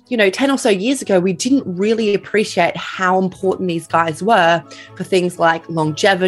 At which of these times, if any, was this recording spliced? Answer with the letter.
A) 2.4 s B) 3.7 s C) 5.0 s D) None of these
D